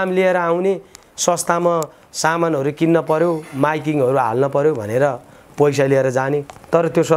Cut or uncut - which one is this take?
uncut